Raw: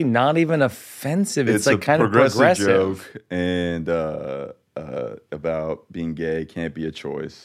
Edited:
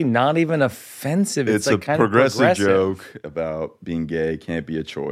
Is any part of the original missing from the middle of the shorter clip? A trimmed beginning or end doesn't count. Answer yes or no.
yes